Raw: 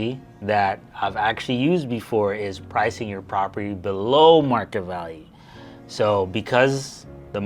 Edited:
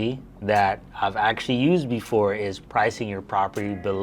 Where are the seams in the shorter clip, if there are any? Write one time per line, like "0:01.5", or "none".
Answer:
none